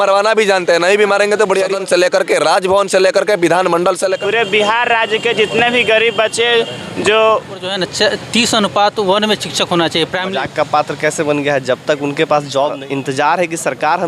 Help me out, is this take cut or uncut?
cut